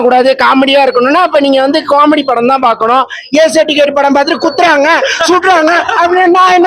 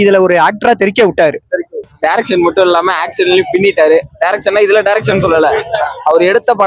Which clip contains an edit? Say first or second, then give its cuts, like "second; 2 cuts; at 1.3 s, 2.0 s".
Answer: second; 1 cut; at 1.9 s